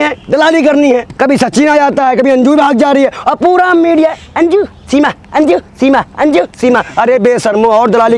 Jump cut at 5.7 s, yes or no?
no